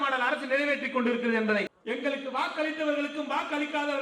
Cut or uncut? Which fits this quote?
cut